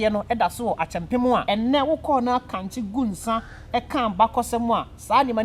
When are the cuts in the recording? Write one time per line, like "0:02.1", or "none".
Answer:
0:01.4